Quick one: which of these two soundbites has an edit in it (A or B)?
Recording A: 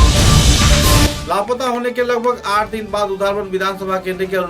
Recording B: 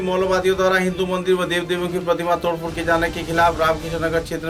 A